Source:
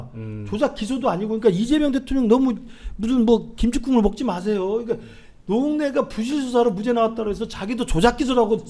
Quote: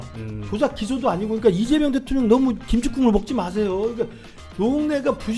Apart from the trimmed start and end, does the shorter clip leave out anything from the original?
yes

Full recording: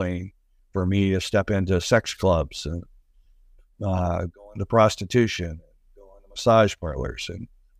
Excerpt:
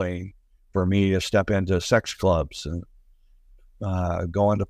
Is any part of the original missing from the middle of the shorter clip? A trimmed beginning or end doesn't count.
no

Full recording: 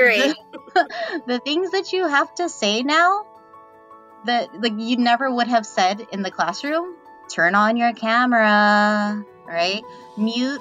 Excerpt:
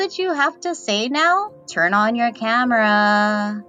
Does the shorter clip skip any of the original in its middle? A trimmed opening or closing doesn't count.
yes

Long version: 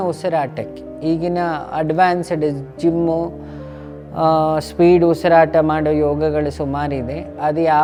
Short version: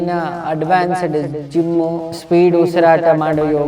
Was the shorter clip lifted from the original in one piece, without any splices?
no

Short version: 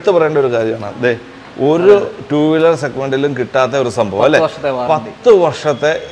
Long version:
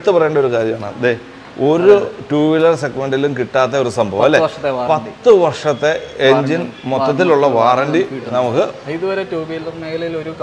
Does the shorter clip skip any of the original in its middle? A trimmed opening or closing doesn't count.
no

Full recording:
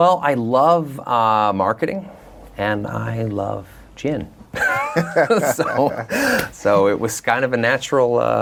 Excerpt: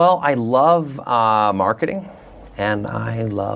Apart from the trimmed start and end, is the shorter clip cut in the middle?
no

